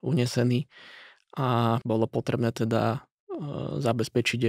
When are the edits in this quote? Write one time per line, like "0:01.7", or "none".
0:01.8